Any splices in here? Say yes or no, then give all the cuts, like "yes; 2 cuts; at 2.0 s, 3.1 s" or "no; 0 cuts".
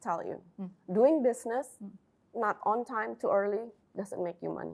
no; 0 cuts